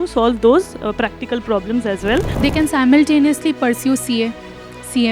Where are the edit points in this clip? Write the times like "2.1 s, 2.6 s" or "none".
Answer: 2.3 s